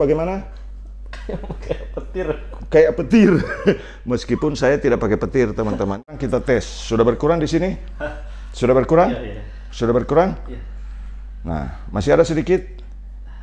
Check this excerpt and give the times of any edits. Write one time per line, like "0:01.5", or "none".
0:06.1